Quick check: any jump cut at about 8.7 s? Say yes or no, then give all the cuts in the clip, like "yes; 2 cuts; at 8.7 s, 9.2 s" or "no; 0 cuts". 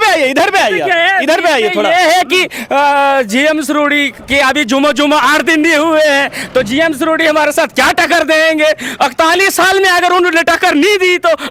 no; 0 cuts